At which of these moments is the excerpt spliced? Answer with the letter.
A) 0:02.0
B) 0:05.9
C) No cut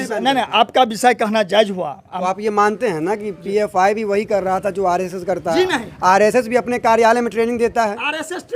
A